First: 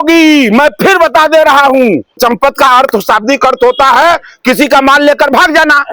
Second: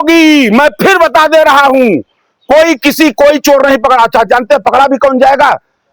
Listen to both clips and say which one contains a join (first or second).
first